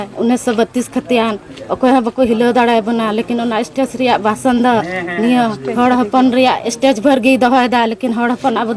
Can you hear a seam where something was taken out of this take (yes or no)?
no